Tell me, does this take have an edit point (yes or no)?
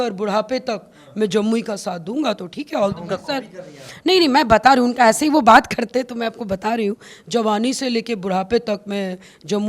no